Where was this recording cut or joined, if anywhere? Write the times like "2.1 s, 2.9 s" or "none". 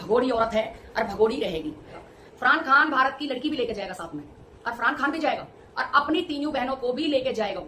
2.0 s